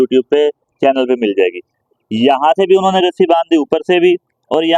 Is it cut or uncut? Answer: uncut